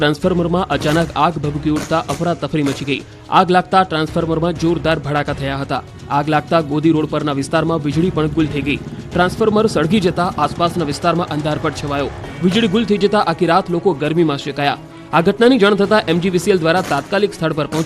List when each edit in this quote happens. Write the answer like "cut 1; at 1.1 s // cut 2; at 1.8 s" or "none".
cut 1; at 12.6 s